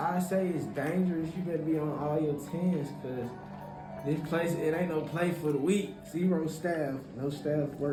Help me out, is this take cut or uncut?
uncut